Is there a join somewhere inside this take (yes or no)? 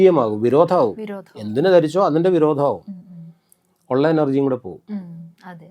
no